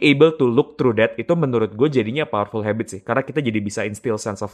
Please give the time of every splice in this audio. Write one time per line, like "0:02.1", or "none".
none